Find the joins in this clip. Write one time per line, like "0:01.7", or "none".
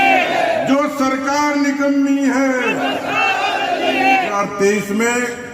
0:04.3